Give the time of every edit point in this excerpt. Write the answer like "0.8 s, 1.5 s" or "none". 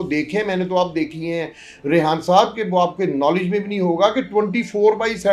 none